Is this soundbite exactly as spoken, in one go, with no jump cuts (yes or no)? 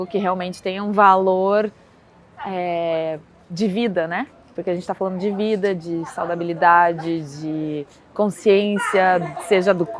yes